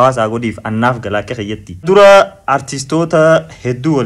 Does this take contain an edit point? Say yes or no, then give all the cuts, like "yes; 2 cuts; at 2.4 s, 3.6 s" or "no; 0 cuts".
yes; 1 cut; at 1.9 s